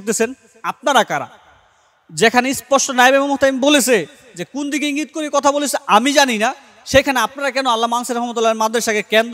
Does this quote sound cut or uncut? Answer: uncut